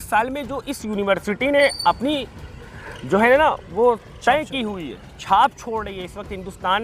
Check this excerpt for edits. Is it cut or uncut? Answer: uncut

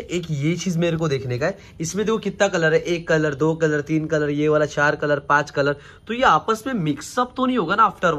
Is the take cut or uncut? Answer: uncut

